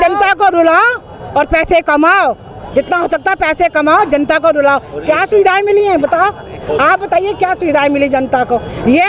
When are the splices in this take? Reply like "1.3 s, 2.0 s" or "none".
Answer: none